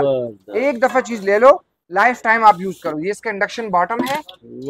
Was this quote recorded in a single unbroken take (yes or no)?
yes